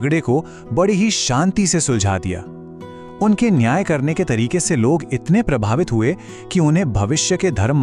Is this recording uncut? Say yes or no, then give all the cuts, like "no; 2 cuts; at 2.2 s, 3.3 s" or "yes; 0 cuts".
no; 1 cut; at 4.7 s